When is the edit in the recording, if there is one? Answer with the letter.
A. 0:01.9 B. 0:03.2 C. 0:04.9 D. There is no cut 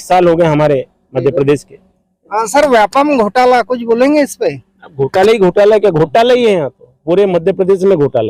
D